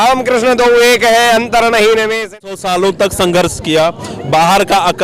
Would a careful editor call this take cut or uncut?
cut